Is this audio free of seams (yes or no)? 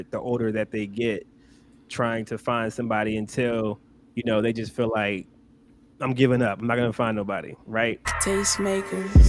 no